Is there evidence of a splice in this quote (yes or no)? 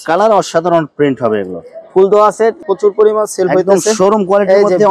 yes